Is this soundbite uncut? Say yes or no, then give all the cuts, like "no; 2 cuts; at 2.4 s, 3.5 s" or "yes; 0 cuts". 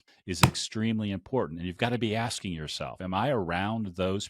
no; 1 cut; at 3.0 s